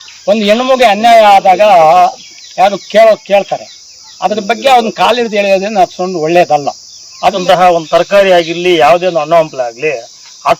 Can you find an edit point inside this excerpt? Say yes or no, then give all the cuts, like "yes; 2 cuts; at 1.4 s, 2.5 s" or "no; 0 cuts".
yes; 1 cut; at 7.4 s